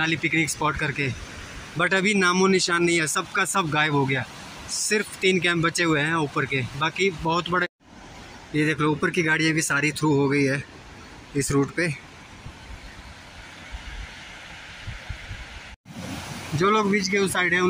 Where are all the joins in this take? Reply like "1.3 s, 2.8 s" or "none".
7.6 s, 15.9 s